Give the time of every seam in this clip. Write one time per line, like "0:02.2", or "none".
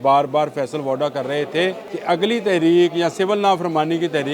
0:01.9